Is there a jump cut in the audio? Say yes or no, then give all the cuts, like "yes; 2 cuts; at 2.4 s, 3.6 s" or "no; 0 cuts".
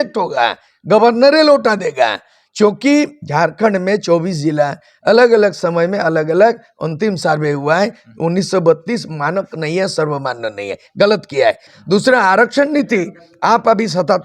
yes; 1 cut; at 11.7 s